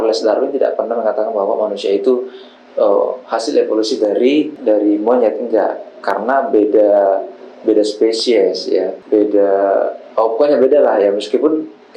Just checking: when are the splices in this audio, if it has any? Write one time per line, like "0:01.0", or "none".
none